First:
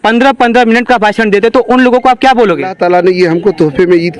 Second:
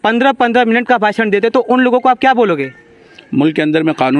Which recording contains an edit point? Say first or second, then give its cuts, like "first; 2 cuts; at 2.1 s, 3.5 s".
first; 1 cut; at 2.8 s